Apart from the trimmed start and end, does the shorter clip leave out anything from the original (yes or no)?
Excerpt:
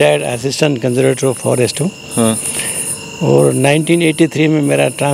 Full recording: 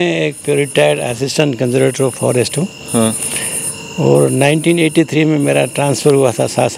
no